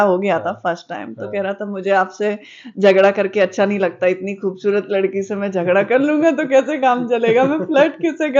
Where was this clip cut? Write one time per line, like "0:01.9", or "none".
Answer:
none